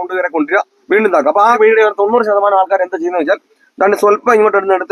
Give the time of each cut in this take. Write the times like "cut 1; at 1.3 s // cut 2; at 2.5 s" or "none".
cut 1; at 1.6 s

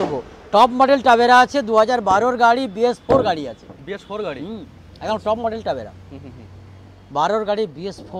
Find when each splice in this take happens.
none

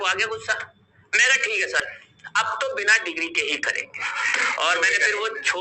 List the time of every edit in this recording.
cut 1; at 1.8 s

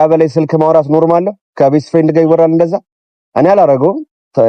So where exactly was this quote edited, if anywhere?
none

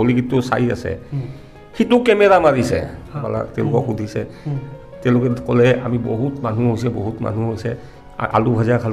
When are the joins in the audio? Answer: cut 1; at 3.2 s

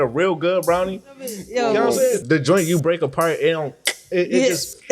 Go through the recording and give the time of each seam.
cut 1; at 1.4 s // cut 2; at 2.2 s

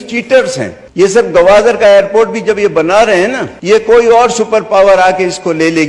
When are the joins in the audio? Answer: cut 1; at 1.1 s // cut 2; at 3.5 s

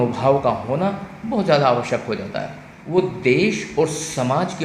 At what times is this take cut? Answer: cut 1; at 2.7 s

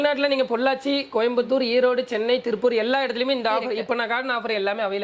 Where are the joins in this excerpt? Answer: none

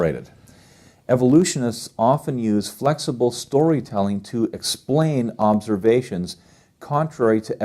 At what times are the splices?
cut 1; at 5.6 s

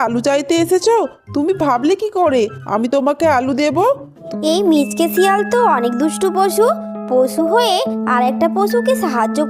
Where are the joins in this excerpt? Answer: cut 1; at 4.3 s

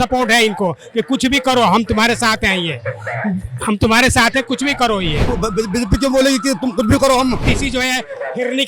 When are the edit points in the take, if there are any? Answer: cut 1; at 5.3 s // cut 2; at 7.4 s

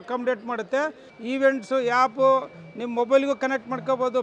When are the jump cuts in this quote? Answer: cut 1; at 1.1 s

